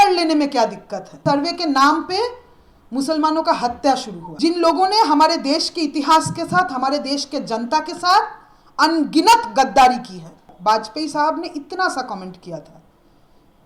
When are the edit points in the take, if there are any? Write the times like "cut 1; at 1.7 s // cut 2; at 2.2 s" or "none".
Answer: cut 1; at 1.2 s // cut 2; at 4.2 s // cut 3; at 10.4 s